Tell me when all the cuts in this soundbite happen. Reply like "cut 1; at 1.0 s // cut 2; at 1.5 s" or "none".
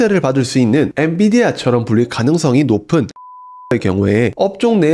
cut 1; at 0.9 s